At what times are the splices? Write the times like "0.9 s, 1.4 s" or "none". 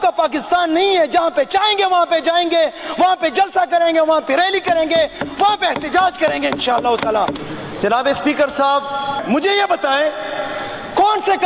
7.4 s